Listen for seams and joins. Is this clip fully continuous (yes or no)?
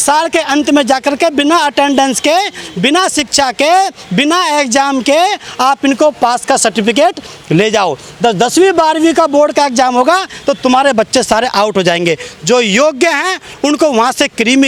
yes